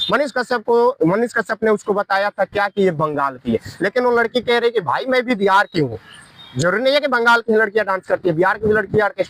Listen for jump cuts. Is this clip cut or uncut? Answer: uncut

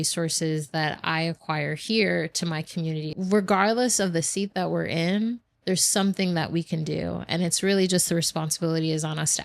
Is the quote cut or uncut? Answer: cut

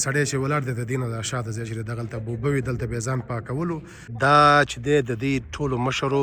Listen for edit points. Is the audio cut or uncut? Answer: cut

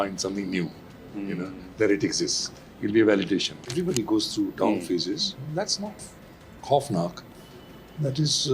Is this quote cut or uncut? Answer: cut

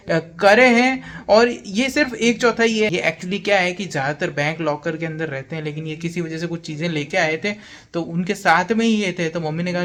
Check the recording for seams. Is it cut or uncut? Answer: uncut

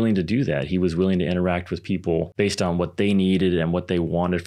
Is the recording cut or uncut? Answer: cut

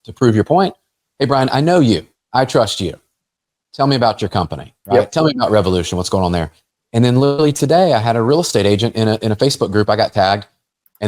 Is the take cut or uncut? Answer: uncut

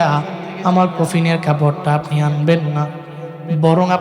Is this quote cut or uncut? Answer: uncut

